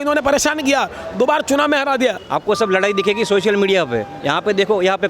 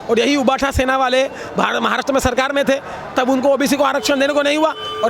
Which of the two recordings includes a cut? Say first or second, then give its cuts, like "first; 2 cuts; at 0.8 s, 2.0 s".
first; 1 cut; at 2.2 s